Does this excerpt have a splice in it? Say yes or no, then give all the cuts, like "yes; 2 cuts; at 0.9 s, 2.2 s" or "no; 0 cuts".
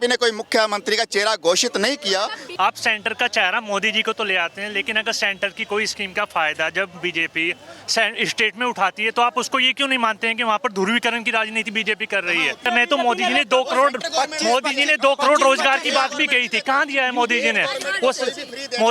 yes; 2 cuts; at 2.4 s, 12.6 s